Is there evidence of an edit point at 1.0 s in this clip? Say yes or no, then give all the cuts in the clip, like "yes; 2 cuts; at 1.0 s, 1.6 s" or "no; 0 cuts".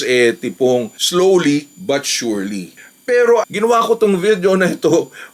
yes; 2 cuts; at 1.0 s, 2.8 s